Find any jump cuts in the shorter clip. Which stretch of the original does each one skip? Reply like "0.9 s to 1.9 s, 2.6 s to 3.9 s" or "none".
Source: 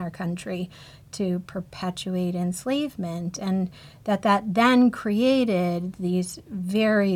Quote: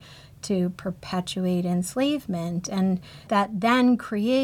4.0 s to 4.2 s